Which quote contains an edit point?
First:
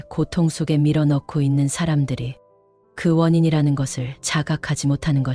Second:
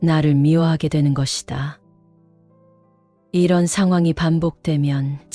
second; 2 cuts; at 1.8 s, 3.3 s

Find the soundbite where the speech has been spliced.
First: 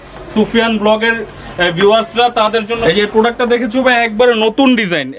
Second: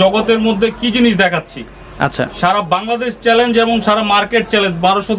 first; 1 cut; at 2.8 s

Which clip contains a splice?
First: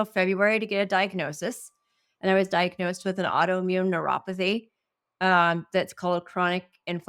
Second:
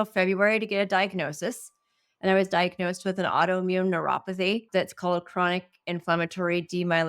second; 1 cut; at 4.7 s

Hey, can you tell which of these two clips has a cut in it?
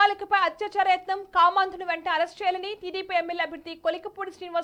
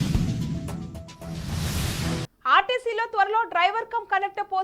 second; 1 cut; at 2.2 s

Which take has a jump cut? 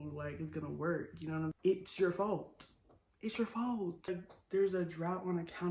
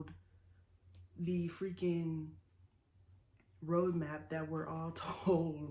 first; 2 cuts; at 1.6 s, 4.1 s

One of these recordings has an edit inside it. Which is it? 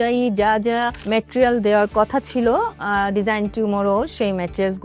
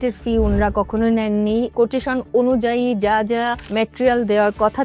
second; 1 cut; at 1.7 s

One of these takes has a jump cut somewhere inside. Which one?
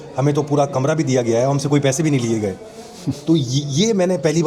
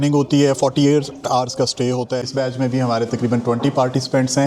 second; 1 cut; at 2.3 s

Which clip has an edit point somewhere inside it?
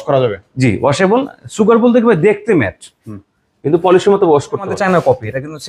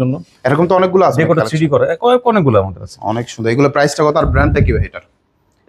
first; 1 cut; at 4.7 s

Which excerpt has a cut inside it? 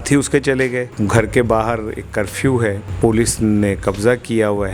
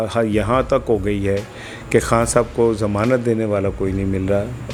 first; 2 cuts; at 0.9 s, 2.9 s

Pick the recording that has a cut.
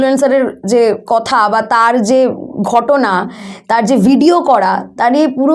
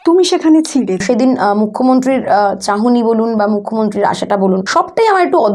second; 2 cuts; at 1.0 s, 4.7 s

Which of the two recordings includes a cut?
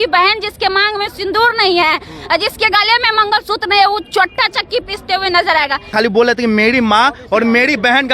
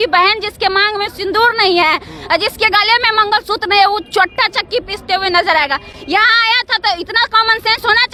first; 1 cut; at 5.9 s

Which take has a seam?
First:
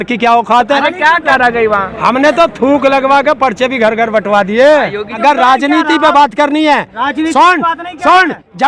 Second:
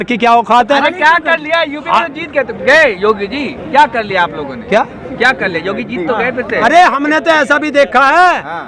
first; 2 cuts; at 1.3 s, 5.2 s

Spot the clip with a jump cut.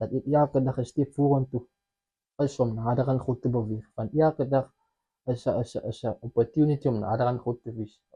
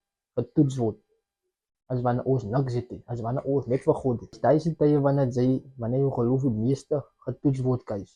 second; 1 cut; at 4.4 s

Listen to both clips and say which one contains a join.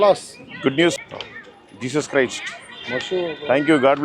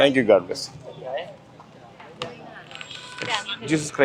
first; 1 cut; at 1.0 s

